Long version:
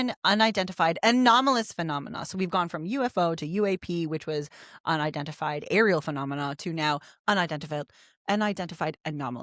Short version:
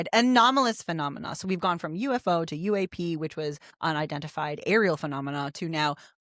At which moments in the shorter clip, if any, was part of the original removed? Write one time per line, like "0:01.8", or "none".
0:03.7

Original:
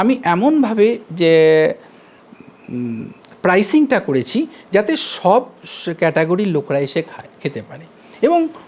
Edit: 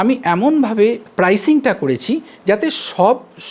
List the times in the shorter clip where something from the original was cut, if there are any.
0:01.0

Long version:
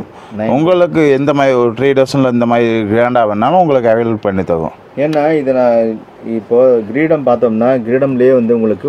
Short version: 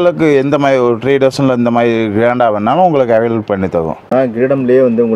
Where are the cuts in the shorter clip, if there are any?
0:04.1

